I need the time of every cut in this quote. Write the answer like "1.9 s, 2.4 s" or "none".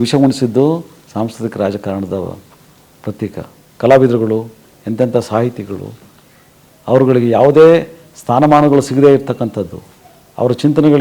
3.6 s